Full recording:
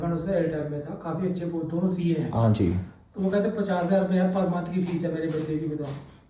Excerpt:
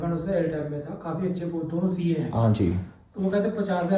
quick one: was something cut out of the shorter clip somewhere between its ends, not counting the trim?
no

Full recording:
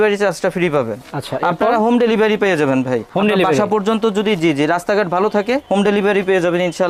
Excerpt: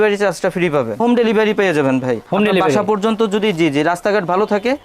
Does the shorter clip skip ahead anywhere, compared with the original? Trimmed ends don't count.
yes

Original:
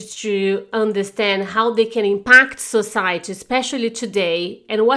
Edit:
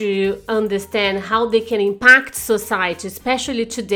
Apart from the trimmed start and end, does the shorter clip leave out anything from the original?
no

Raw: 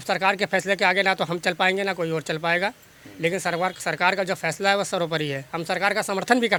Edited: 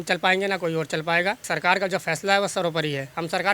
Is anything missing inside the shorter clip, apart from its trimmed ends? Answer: yes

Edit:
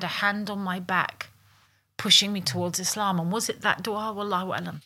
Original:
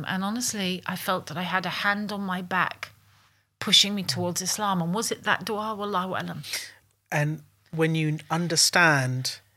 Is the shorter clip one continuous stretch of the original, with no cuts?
yes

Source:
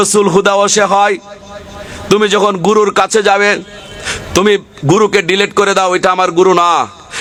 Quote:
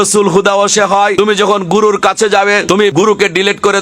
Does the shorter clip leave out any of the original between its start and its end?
yes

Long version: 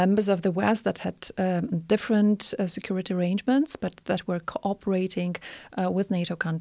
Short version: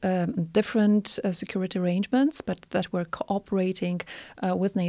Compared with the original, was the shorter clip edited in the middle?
no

